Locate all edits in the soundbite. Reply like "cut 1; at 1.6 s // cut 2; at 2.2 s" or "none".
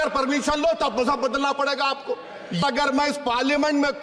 cut 1; at 2.6 s